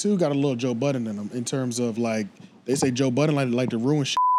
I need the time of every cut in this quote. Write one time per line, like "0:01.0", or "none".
none